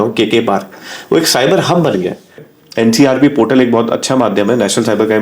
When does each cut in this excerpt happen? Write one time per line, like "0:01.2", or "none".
0:02.5